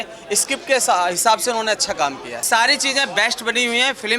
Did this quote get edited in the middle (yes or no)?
yes